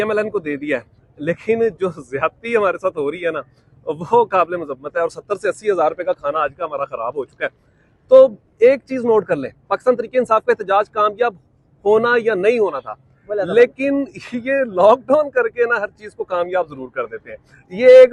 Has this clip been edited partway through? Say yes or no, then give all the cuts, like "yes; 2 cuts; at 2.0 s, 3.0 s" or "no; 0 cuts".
no; 0 cuts